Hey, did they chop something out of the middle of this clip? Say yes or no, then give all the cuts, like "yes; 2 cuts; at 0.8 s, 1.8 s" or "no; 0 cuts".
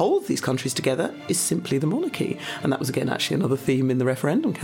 no; 0 cuts